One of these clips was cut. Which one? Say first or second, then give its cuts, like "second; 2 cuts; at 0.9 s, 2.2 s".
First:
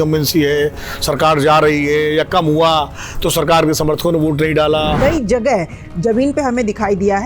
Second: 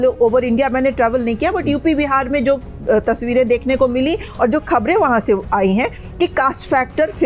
first; 1 cut; at 5.0 s